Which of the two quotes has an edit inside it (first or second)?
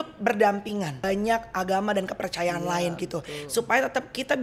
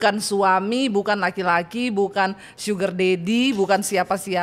first